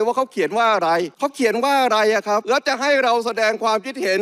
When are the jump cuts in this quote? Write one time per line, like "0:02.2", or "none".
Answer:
0:01.1
0:02.4